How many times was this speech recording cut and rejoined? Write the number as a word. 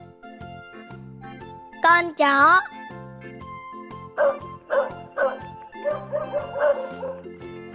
zero